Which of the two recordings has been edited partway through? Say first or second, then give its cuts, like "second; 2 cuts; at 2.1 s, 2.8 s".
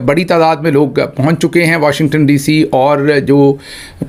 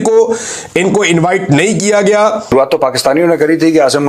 second; 1 cut; at 2.5 s